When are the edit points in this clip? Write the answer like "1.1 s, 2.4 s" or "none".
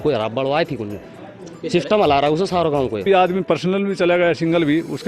3.0 s